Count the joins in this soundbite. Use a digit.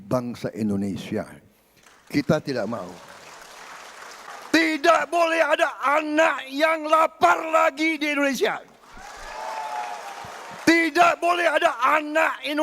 1